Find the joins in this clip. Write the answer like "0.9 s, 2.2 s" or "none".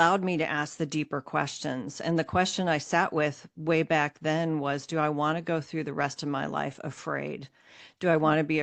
none